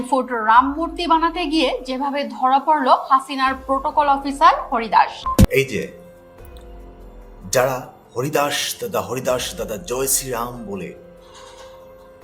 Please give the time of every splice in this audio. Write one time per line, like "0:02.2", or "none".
0:05.4